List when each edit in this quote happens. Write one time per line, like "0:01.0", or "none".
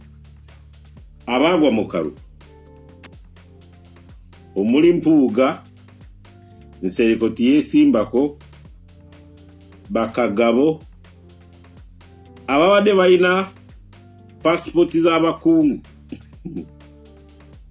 0:00.9
0:02.4
0:04.5